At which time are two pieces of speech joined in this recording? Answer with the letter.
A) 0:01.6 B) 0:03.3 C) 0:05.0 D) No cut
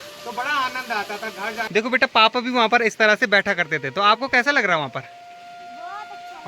A